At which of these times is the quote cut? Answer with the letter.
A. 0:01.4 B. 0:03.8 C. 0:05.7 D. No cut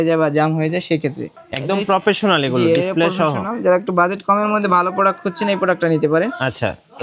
A